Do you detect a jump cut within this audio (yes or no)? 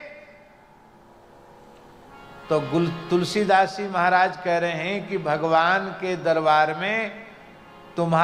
no